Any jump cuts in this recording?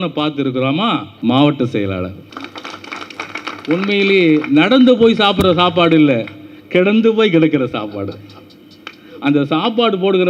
yes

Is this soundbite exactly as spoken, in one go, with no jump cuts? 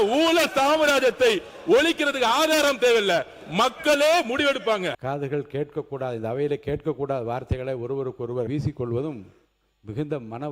no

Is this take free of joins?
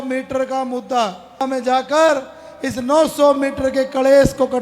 no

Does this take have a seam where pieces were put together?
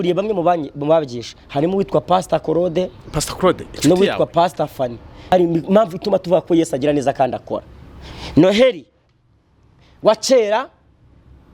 yes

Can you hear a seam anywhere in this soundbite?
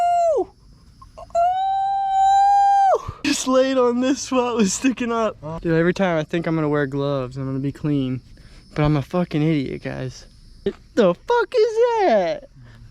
yes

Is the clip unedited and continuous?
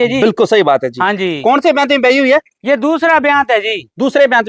yes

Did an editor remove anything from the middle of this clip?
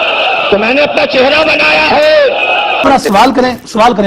yes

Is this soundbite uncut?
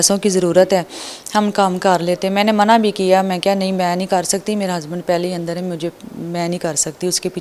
yes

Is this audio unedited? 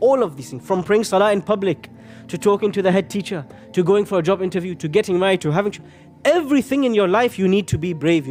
yes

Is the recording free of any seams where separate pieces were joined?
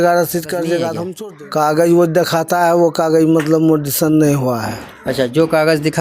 no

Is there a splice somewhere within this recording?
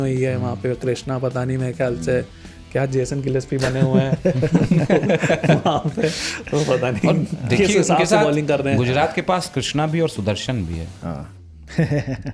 no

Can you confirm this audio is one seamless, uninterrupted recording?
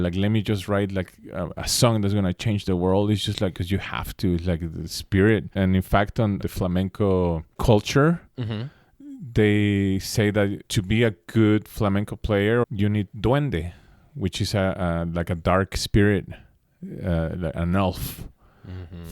no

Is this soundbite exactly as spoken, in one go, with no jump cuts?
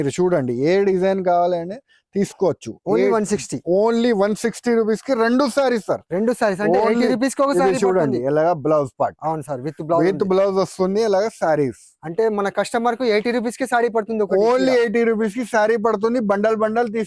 yes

